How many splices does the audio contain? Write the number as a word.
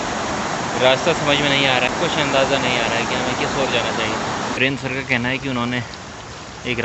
zero